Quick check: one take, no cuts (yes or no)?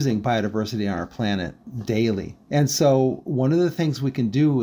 no